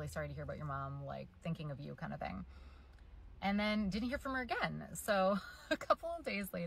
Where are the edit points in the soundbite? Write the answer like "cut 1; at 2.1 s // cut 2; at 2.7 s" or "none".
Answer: cut 1; at 4.7 s